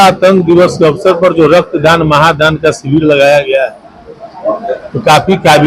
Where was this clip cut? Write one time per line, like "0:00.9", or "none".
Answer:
none